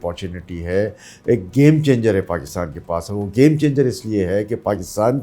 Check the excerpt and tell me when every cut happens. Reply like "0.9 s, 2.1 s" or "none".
none